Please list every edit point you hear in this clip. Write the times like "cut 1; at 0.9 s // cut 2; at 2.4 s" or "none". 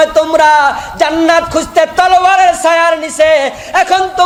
none